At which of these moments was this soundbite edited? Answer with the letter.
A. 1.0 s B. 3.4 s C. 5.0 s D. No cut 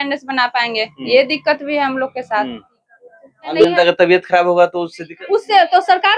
B